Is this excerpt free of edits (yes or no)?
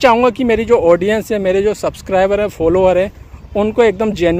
yes